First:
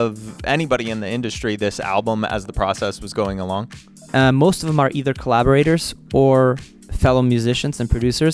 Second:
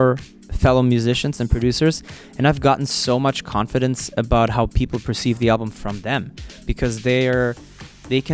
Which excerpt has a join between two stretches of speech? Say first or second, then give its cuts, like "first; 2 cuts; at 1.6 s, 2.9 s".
first; 1 cut; at 4.0 s